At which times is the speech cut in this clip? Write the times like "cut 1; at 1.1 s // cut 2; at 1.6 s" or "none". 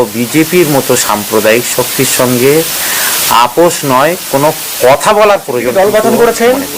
cut 1; at 5.7 s